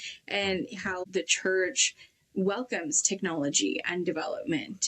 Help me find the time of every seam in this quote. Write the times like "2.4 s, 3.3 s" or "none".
1.0 s